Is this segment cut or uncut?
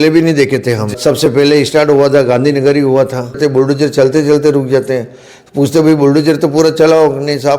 cut